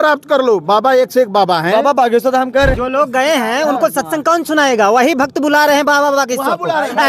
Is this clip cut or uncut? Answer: cut